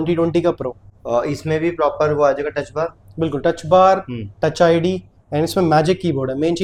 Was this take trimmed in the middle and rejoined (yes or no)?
no